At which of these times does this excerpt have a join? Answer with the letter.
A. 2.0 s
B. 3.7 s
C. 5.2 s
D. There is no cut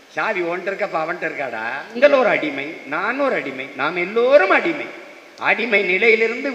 A